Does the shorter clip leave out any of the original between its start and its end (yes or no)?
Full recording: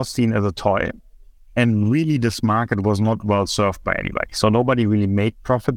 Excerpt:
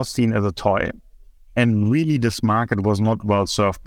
no